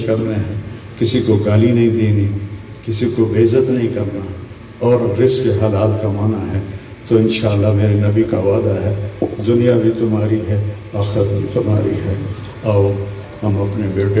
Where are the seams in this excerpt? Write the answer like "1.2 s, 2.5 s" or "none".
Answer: 13.3 s